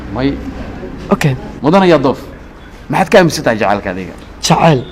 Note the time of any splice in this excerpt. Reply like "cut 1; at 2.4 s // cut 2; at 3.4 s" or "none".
cut 1; at 1.5 s